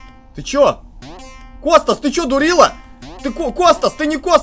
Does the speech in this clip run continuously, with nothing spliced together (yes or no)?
yes